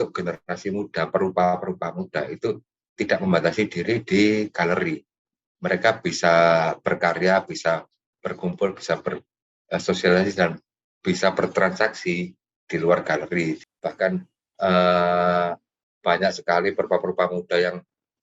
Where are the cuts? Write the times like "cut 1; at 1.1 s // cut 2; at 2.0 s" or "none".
cut 1; at 13.6 s